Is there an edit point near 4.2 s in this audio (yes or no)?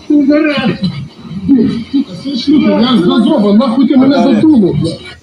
no